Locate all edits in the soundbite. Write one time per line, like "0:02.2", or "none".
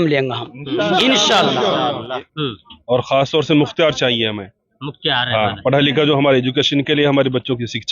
0:02.3

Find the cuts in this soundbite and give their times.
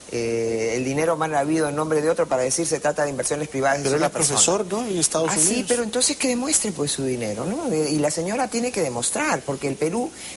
0:04.6

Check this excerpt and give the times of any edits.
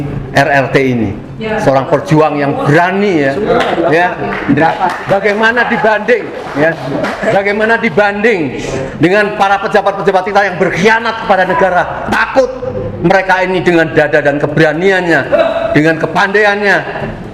none

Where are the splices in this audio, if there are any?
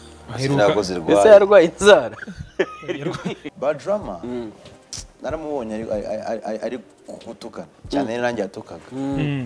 0:03.5

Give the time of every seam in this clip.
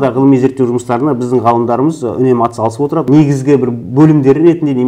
0:03.1

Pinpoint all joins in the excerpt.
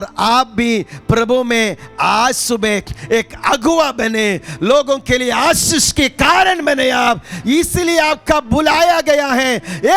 none

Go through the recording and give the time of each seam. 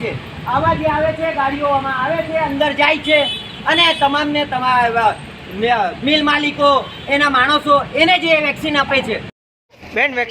0:09.4

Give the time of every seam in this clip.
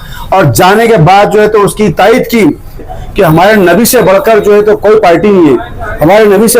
0:03.0

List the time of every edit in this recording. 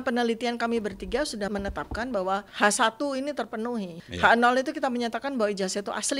0:01.5
0:02.5
0:04.0

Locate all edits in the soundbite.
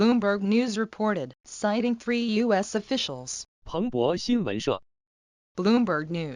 0:00.9

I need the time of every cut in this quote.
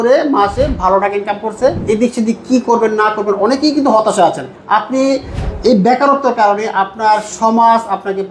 0:01.8
0:04.5

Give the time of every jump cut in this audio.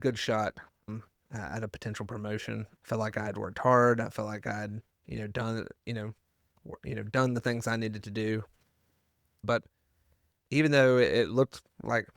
0:09.4

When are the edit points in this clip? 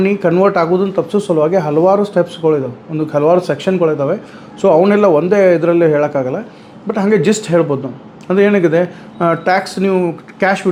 none

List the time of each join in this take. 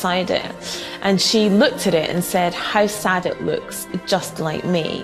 none

